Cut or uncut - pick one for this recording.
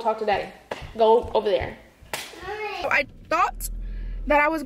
cut